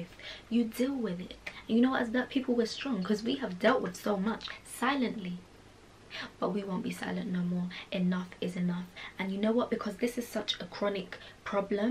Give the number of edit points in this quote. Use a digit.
0